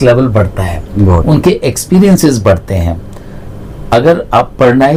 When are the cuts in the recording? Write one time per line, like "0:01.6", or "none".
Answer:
none